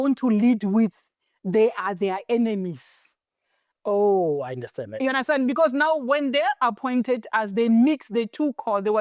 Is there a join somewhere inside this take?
no; 0 cuts

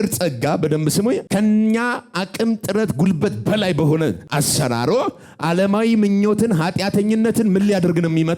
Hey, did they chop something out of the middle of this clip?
yes; 2 cuts; at 1.2 s, 4.2 s

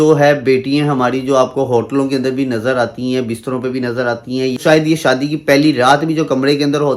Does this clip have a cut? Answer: yes; 1 cut; at 4.6 s

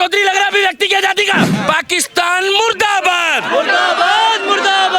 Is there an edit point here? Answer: yes; 1 cut; at 1.6 s

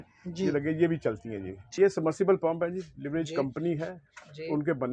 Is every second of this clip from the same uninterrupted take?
no; 1 cut; at 1.6 s

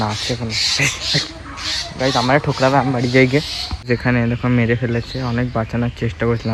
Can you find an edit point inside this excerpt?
no; 0 cuts

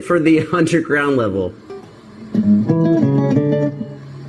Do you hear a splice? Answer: yes; 1 cut; at 1.6 s

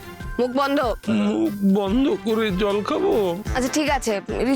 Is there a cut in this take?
yes; 1 cut; at 3.4 s

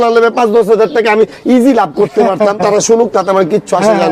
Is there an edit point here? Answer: no; 0 cuts

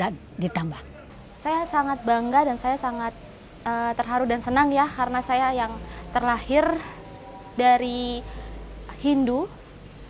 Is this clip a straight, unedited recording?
no; 1 cut; at 0.9 s

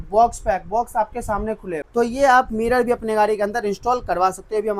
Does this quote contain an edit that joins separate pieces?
yes; 1 cut; at 1.8 s

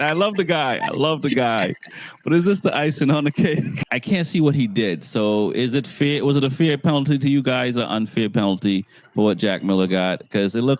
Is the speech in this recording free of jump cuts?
no; 1 cut; at 3.8 s

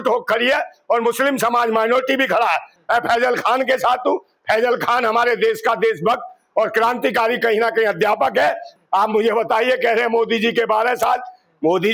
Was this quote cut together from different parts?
yes; 2 cuts; at 2.7 s, 8.7 s

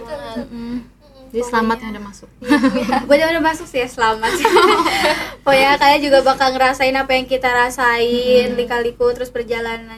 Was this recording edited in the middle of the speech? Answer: no; 0 cuts

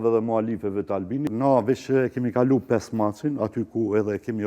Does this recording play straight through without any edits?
no; 1 cut; at 1.3 s

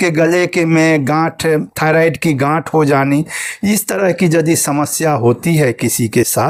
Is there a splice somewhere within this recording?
no; 0 cuts

